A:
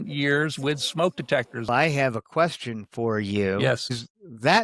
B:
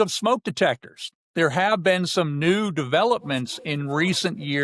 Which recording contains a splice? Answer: A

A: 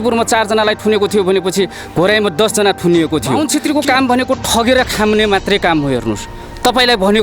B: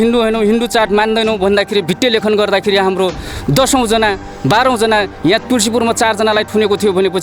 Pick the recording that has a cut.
A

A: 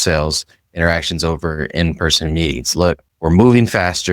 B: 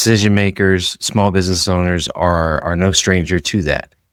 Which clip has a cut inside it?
A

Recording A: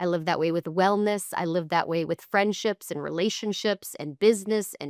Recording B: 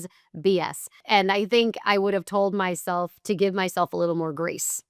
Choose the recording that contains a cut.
B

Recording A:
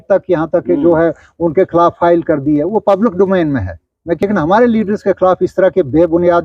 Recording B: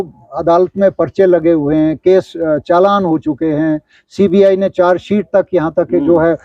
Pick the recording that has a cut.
A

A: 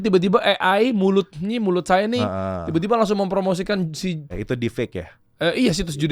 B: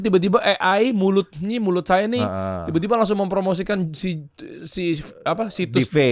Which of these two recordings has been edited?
A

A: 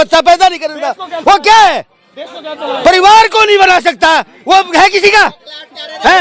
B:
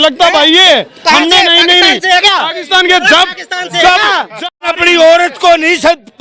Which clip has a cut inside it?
B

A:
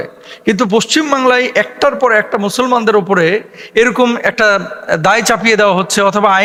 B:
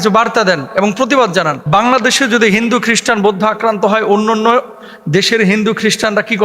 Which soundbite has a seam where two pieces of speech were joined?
B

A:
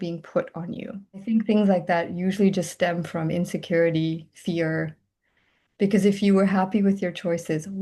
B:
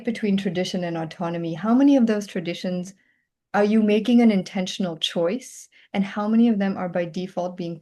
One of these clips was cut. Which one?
A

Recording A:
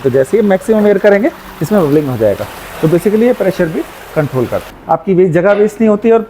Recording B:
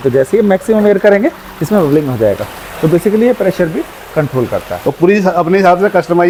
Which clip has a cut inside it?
A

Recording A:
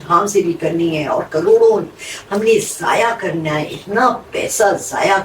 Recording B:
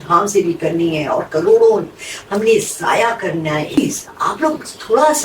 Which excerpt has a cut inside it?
B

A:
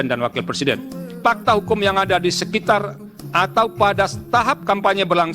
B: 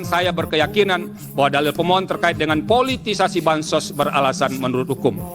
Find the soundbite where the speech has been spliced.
A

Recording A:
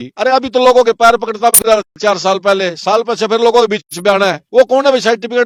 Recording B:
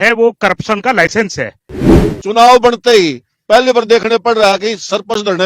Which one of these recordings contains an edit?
B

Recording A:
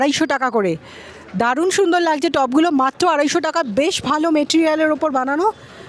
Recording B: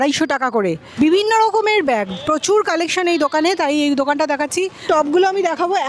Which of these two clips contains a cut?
B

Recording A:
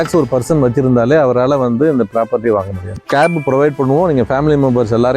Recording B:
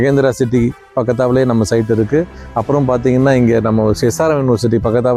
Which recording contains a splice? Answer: A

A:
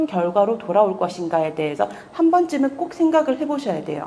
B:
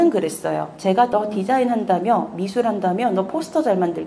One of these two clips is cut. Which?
B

